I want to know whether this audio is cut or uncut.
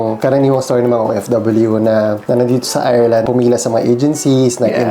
cut